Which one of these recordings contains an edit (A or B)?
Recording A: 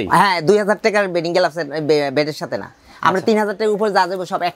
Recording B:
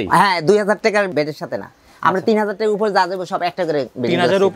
B